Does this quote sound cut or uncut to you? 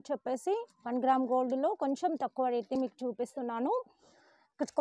uncut